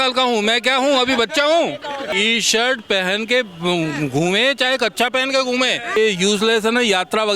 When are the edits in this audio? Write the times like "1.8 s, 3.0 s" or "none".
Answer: 2.1 s, 6.0 s